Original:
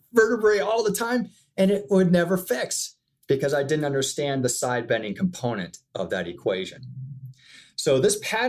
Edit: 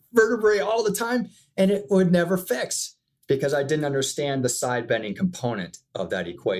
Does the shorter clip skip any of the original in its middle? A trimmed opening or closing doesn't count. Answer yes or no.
no